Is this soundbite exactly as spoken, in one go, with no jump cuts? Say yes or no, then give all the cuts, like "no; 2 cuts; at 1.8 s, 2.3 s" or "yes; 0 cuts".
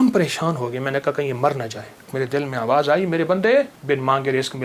no; 2 cuts; at 2.1 s, 3.8 s